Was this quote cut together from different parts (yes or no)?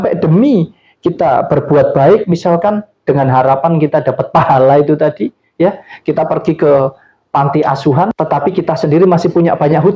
yes